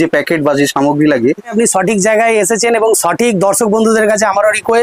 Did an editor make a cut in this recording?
yes; 1 cut; at 1.5 s

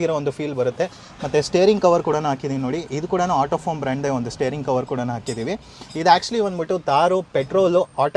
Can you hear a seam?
no; 0 cuts

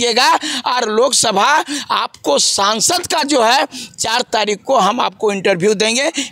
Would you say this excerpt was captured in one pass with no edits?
yes; 0 cuts

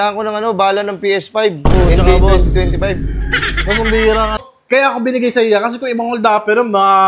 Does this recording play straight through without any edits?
no; 1 cut; at 4.4 s

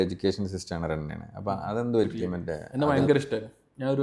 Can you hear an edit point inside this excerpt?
yes; 1 cut; at 2.6 s

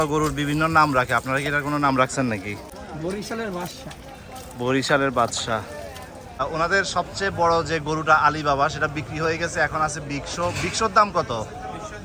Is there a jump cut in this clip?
yes; 2 cuts; at 2.7 s, 6.4 s

